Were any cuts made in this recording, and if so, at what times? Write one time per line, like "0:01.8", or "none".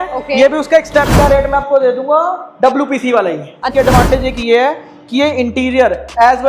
0:01.1
0:03.6